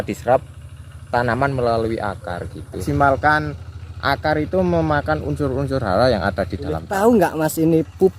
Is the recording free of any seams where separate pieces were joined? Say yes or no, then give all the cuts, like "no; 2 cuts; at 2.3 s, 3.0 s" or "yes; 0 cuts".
no; 2 cuts; at 2.8 s, 6.9 s